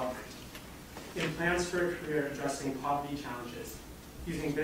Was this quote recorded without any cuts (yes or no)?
yes